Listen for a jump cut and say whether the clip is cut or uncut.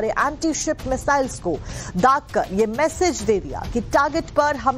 uncut